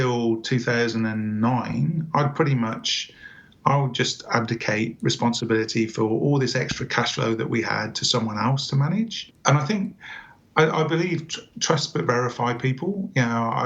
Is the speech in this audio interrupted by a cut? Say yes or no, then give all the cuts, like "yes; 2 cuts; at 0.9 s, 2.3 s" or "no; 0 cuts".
yes; 1 cut; at 9.3 s